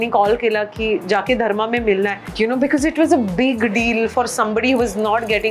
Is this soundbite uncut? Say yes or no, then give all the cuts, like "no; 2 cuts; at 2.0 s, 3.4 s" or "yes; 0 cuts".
no; 1 cut; at 2.2 s